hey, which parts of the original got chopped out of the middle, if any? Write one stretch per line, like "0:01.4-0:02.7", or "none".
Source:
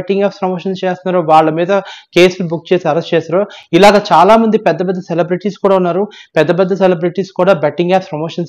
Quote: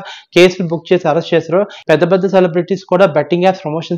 0:03.6-0:06.2